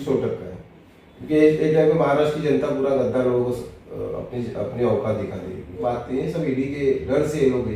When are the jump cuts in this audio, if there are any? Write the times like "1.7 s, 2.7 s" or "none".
5.8 s

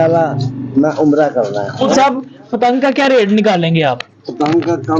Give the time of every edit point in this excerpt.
1.9 s

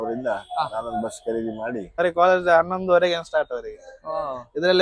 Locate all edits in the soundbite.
2.0 s

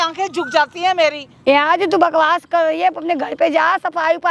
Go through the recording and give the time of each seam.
1.6 s

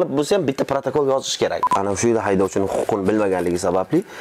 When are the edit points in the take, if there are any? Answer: 1.6 s

